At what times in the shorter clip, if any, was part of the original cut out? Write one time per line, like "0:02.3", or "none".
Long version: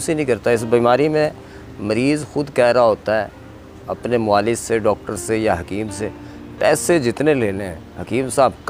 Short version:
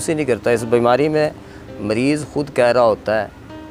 none